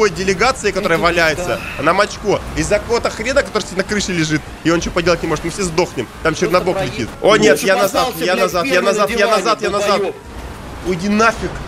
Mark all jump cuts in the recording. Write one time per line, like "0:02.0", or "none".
none